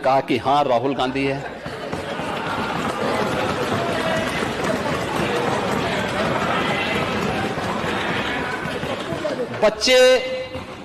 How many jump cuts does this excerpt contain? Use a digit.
4